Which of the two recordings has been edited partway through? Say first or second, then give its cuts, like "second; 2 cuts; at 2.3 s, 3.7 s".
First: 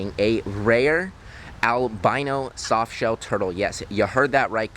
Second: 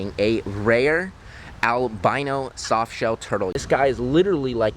second; 1 cut; at 3.6 s